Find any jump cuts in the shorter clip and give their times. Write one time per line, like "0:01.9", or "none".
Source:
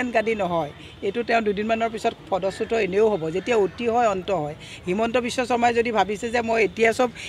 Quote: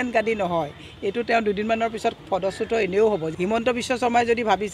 0:03.3